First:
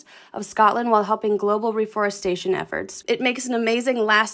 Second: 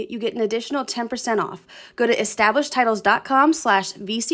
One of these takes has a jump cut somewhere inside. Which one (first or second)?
first